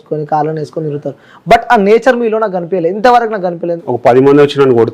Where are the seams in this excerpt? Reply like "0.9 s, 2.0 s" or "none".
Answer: 3.8 s